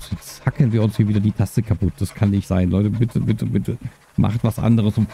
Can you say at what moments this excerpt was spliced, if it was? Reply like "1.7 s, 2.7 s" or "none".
none

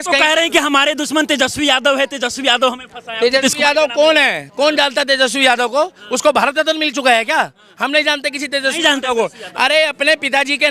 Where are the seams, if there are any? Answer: none

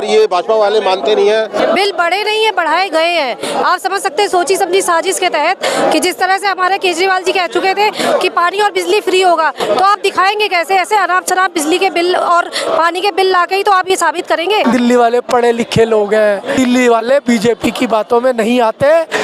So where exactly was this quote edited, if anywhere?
1.6 s, 14.6 s, 16.6 s

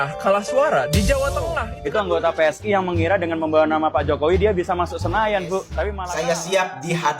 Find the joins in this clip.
1.7 s, 6.0 s

